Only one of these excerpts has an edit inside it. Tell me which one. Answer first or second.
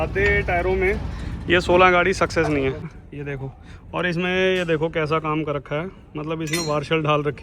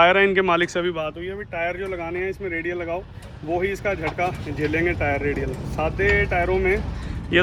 first